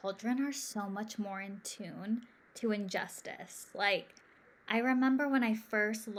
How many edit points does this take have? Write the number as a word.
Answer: zero